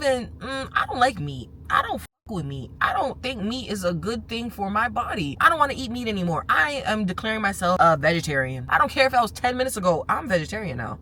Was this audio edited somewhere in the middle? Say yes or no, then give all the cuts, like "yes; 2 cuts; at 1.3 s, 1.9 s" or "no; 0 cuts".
yes; 2 cuts; at 5.3 s, 8.6 s